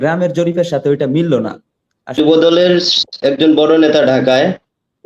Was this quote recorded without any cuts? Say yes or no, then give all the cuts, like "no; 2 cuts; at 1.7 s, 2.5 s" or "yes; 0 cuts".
no; 1 cut; at 2.2 s